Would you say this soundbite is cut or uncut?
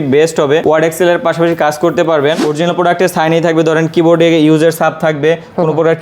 cut